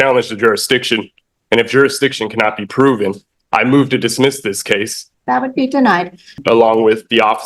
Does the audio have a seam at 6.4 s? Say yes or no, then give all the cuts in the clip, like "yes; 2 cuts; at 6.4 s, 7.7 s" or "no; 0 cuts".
yes; 2 cuts; at 5.0 s, 6.4 s